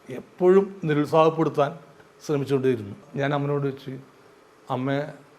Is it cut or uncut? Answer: cut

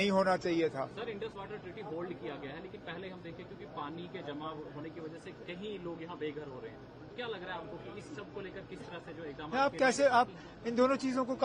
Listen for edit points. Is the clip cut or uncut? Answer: uncut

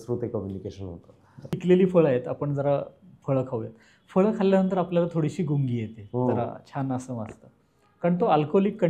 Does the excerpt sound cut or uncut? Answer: cut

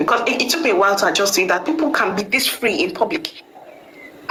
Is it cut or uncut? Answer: uncut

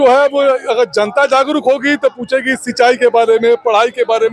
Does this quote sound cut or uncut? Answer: uncut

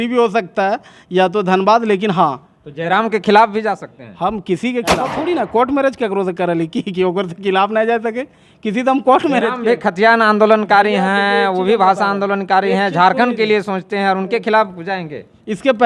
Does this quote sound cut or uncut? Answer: cut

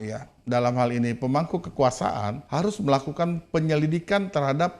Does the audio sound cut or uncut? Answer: cut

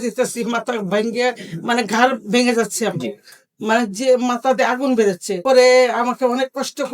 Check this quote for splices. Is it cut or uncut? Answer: uncut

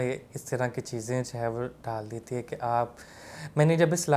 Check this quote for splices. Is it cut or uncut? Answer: uncut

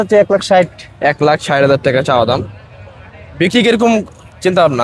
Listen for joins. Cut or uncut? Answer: uncut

